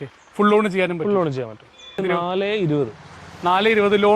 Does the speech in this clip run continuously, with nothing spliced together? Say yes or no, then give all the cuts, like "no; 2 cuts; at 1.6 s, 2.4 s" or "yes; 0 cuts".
no; 1 cut; at 2.0 s